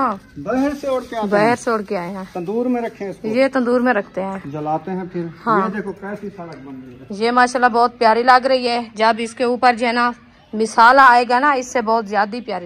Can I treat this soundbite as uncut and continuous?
yes; 0 cuts

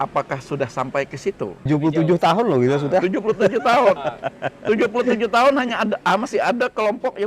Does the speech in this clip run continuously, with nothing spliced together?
no; 1 cut; at 1.7 s

